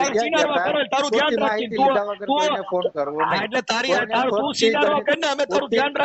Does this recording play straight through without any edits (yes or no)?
yes